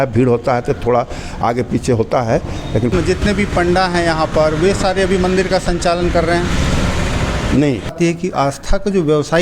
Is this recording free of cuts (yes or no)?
no